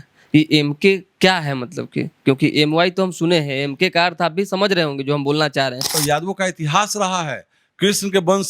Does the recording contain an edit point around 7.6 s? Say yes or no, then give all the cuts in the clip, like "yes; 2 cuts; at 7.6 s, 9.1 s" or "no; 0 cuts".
no; 1 cut; at 6.0 s